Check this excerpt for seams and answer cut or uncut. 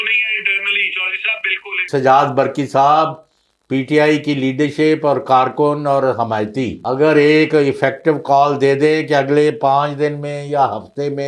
cut